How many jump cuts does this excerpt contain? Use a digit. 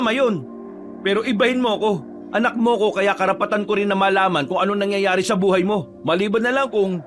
2